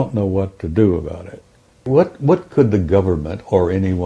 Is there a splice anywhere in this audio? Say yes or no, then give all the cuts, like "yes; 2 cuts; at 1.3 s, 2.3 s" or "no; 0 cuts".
yes; 1 cut; at 1.8 s